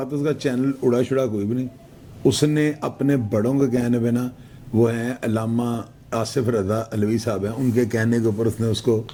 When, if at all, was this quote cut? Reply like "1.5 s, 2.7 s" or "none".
none